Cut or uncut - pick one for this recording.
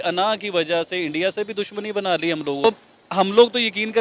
cut